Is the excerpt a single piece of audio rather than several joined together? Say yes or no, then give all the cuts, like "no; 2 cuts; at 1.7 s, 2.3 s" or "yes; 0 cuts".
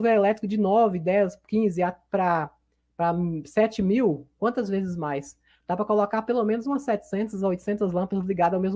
yes; 0 cuts